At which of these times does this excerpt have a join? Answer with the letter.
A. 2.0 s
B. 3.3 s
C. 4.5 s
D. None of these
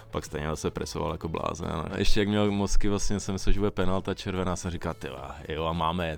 A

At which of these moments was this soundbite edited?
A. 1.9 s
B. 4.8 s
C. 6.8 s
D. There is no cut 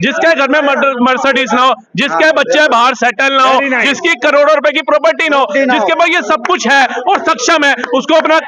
D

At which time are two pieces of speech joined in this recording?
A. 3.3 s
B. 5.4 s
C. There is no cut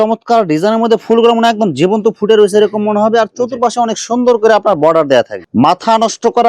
B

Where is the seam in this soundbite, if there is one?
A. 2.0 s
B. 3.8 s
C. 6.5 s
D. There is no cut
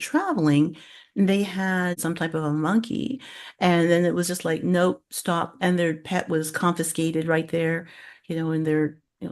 A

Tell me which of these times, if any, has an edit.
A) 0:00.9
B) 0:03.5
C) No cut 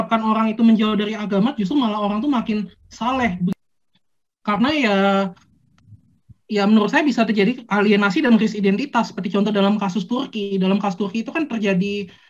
B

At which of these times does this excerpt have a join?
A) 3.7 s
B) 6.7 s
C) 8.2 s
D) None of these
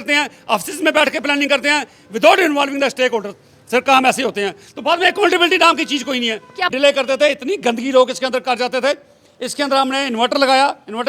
B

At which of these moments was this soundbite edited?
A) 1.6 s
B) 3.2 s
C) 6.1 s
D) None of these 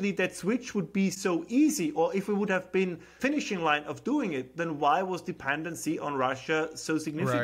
B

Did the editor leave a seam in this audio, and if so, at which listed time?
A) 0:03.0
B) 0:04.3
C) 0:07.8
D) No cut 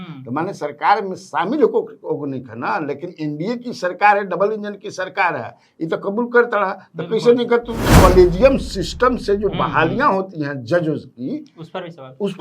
C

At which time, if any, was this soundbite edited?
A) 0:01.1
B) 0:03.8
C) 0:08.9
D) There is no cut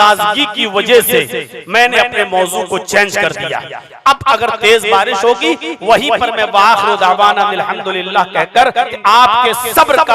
C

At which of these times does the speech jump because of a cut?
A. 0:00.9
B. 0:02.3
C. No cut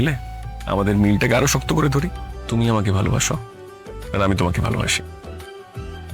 B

